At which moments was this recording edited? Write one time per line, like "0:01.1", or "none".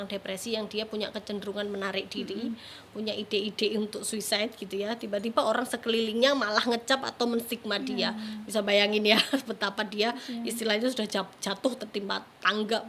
none